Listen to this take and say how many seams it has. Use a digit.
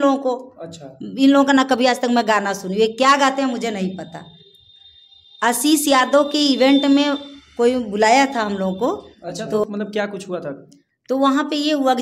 0